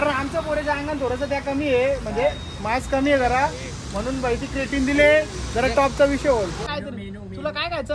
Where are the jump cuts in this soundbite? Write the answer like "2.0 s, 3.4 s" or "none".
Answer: 6.7 s